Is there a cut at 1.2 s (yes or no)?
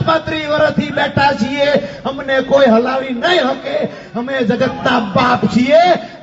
no